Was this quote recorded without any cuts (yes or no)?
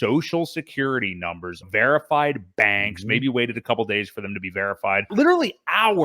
no